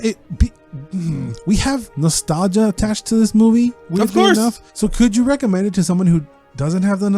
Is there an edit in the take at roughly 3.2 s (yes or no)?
no